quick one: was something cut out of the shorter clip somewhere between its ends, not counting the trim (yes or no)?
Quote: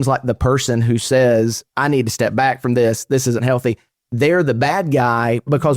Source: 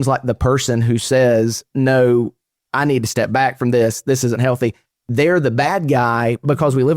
yes